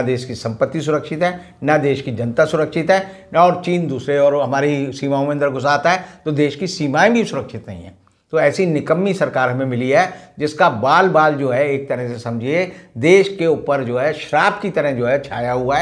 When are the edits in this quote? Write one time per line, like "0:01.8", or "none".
none